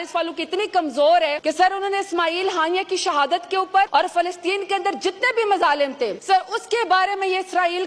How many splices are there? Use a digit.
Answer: 3